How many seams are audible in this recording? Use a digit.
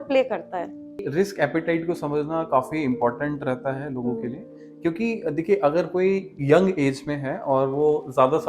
1